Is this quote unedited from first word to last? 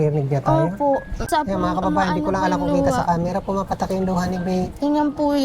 no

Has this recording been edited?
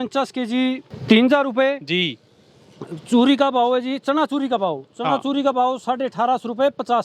yes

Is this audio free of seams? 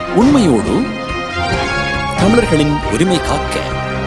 yes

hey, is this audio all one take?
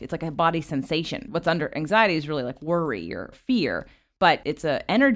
no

